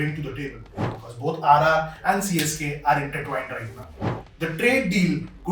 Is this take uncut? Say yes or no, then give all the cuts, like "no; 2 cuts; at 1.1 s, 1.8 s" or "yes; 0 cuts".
no; 2 cuts; at 0.9 s, 4.1 s